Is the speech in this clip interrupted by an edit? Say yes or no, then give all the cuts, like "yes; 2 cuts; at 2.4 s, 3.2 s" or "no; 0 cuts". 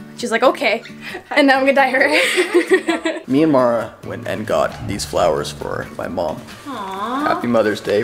yes; 2 cuts; at 3.2 s, 6.5 s